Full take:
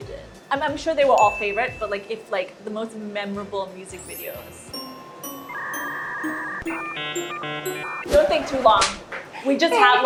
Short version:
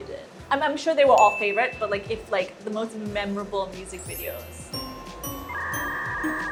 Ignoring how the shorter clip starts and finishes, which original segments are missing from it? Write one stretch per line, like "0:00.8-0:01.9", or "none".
none